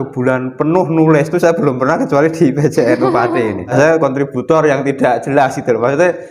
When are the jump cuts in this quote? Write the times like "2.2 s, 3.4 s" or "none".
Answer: 3.7 s